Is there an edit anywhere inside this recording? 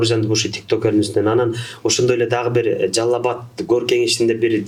no; 0 cuts

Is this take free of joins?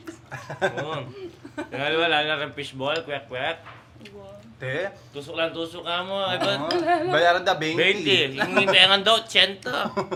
yes; 0 cuts

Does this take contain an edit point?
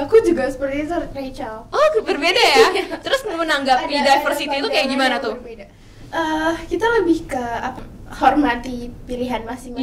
yes; 1 cut; at 7.8 s

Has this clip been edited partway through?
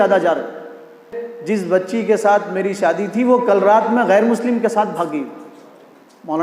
yes; 1 cut; at 1.1 s

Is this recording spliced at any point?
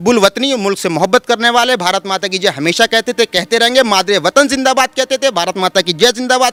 no; 0 cuts

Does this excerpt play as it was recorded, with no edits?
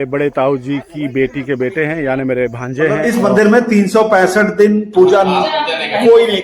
no; 1 cut; at 3.0 s

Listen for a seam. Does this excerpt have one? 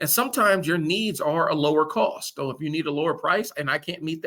no; 0 cuts

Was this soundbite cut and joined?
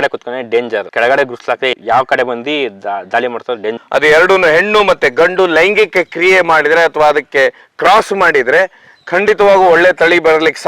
yes; 2 cuts; at 1.7 s, 3.8 s

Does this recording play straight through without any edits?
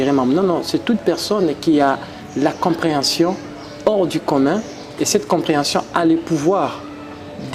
yes; 0 cuts

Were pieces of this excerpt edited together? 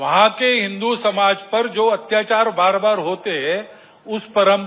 no; 0 cuts

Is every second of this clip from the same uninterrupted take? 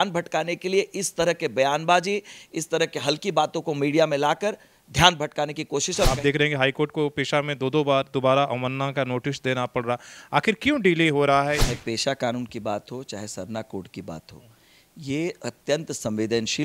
no; 2 cuts; at 6.1 s, 11.7 s

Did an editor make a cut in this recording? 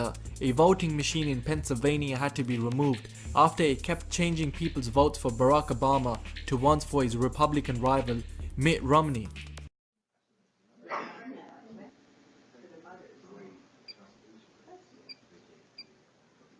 yes; 1 cut; at 8.5 s

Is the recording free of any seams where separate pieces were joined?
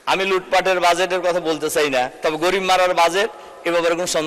yes; 0 cuts

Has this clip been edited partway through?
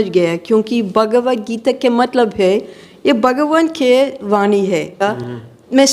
yes; 1 cut; at 5.0 s

